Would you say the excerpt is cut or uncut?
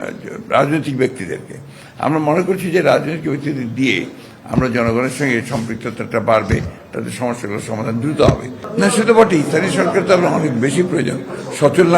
cut